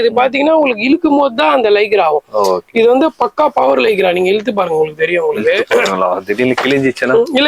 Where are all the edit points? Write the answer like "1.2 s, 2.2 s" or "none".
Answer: none